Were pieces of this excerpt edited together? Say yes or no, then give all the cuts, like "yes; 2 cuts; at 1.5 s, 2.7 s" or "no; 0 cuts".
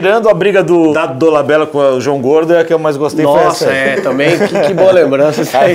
no; 0 cuts